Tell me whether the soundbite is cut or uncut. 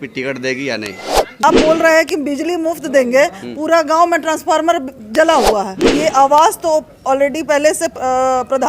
cut